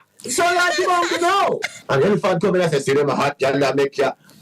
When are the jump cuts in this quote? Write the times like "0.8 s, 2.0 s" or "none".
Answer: 1.7 s